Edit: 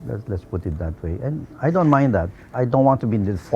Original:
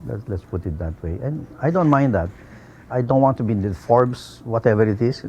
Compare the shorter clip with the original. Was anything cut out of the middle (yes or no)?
yes